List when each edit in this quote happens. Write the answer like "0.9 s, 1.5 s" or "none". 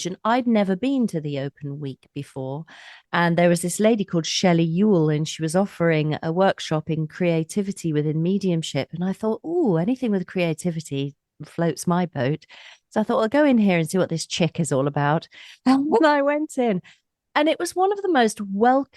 2.9 s